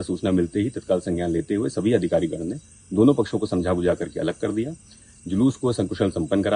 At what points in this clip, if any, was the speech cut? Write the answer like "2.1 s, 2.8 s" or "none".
none